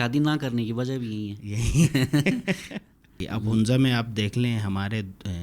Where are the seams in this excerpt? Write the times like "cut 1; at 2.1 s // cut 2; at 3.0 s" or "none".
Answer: cut 1; at 3.3 s